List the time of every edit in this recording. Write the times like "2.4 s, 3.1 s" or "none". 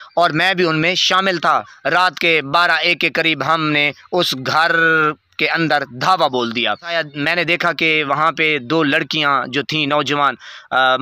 1.7 s, 6.9 s